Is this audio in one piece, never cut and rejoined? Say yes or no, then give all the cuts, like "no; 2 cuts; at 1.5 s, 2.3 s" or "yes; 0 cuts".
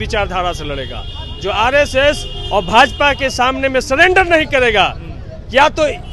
yes; 0 cuts